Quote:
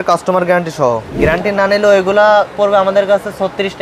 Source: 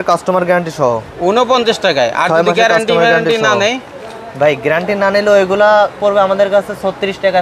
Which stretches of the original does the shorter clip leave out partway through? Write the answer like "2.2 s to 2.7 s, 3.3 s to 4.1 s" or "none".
1.1 s to 4.6 s